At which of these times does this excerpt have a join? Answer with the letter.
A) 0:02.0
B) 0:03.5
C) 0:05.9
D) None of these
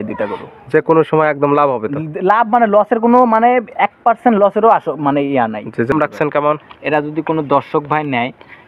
C